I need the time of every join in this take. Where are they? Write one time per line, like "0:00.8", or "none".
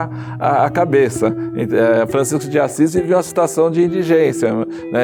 none